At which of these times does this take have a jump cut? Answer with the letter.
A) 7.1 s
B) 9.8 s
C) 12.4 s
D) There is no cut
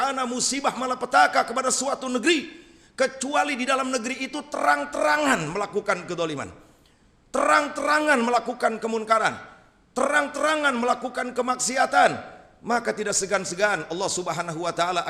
D